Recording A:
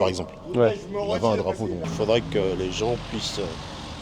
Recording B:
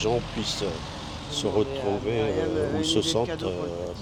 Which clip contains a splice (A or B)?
A